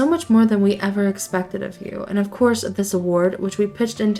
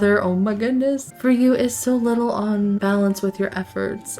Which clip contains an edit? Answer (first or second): second